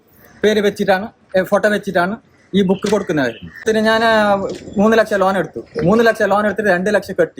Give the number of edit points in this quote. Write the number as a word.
one